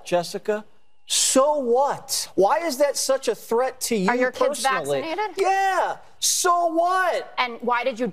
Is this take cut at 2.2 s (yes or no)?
yes